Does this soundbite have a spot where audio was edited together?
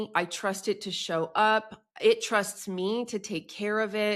no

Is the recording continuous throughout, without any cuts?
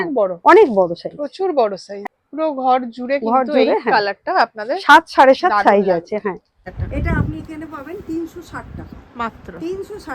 no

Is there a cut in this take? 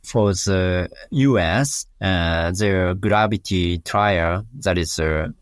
yes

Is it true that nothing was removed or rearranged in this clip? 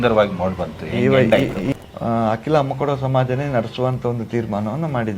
no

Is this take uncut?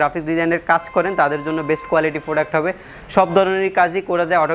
yes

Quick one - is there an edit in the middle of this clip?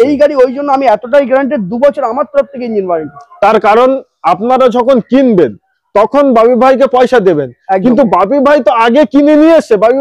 no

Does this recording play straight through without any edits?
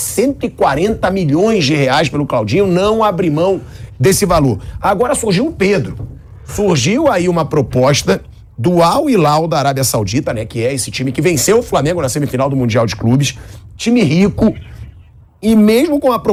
yes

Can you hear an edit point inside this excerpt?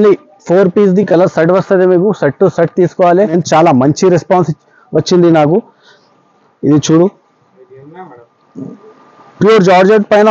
yes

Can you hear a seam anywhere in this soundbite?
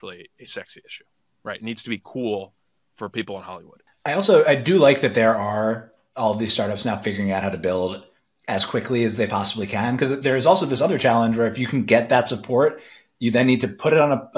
no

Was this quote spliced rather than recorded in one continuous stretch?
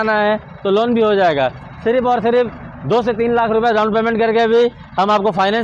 no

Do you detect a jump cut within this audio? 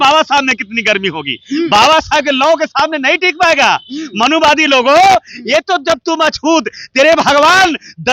no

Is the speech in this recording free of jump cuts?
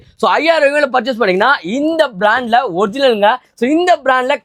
yes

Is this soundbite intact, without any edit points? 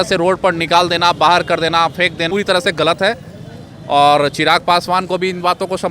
yes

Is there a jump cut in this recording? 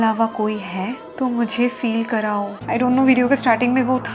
yes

